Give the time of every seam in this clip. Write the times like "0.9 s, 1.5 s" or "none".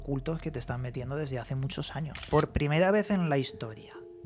2.2 s